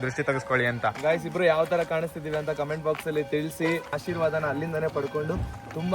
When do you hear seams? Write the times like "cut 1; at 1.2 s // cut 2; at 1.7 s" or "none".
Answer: cut 1; at 3.9 s